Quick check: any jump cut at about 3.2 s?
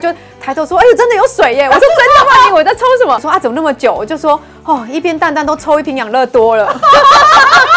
yes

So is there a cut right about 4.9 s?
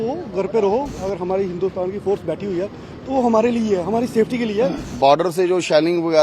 yes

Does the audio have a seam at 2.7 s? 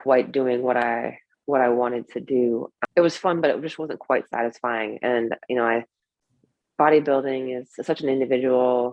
yes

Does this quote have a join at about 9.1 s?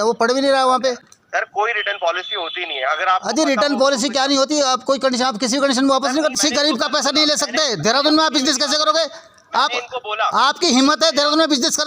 no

